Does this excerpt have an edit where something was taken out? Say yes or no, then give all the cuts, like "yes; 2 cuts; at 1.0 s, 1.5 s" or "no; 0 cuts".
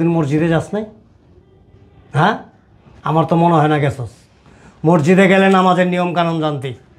no; 0 cuts